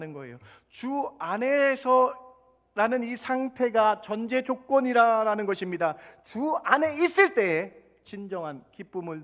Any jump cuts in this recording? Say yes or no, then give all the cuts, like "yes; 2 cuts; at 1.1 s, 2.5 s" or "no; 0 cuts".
no; 0 cuts